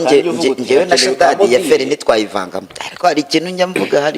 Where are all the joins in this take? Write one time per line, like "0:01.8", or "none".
0:02.7